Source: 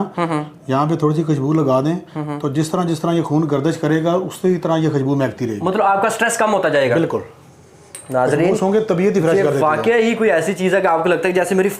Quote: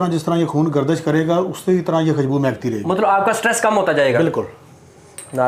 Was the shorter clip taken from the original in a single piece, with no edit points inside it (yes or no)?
yes